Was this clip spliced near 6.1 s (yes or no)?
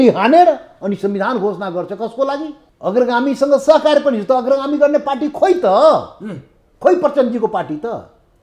no